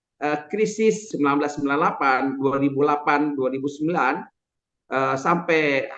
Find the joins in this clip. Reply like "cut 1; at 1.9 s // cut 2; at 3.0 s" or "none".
cut 1; at 1.1 s